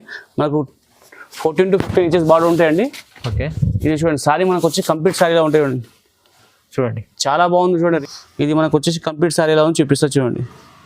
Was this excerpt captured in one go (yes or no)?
no